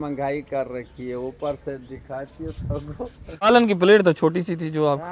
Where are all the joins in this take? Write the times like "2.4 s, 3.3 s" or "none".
3.5 s